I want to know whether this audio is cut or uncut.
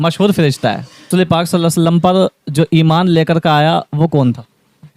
cut